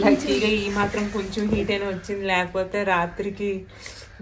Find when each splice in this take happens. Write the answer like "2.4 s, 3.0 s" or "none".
none